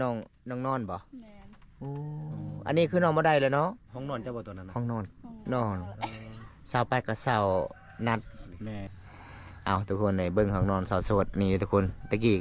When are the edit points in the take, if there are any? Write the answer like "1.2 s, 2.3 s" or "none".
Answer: 8.9 s